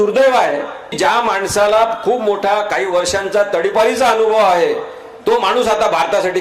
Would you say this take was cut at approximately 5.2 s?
no; 1 cut; at 0.9 s

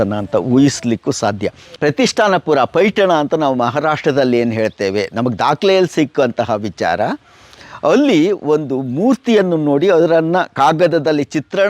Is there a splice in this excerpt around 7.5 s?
no; 1 cut; at 1.7 s

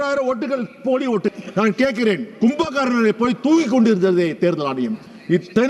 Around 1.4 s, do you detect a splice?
yes; 1 cut; at 1.4 s

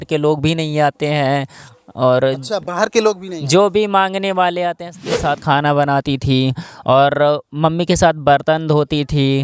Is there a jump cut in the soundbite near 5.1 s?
yes; 1 cut; at 5.1 s

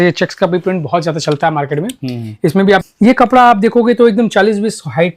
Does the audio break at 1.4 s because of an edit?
no; 1 cut; at 2.8 s

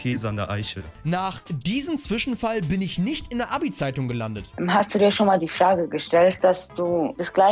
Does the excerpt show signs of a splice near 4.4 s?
yes; 3 cuts; at 1.0 s, 4.4 s, 6.4 s

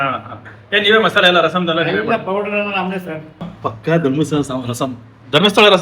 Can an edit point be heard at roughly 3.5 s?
yes; 1 cut; at 3.5 s

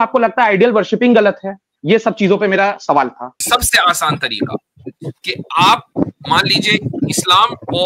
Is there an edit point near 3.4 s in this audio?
yes; 1 cut; at 3.4 s

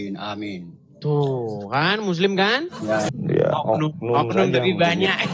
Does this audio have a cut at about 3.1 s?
yes; 1 cut; at 3.1 s

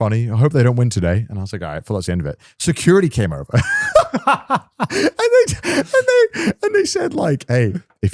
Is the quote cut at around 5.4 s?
no; 0 cuts

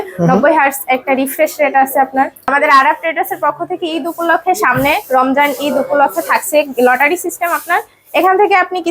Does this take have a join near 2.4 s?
yes; 1 cut; at 2.4 s

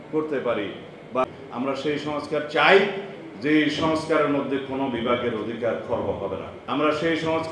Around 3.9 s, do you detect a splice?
no; 2 cuts; at 1.2 s, 6.5 s

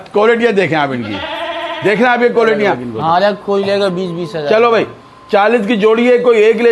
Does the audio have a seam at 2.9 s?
yes; 1 cut; at 2.9 s

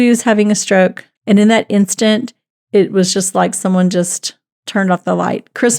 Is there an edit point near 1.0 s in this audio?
yes; 1 cut; at 1.0 s

